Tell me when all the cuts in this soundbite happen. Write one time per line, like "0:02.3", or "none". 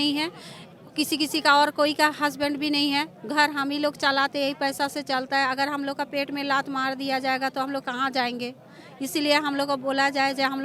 none